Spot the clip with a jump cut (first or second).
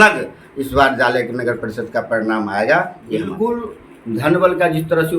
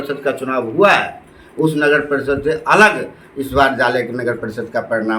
first